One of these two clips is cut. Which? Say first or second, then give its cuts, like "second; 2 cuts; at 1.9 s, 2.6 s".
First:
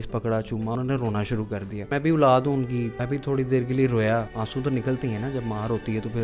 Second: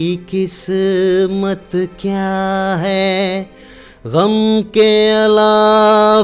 first; 4 cuts; at 0.8 s, 1.9 s, 3.0 s, 4.4 s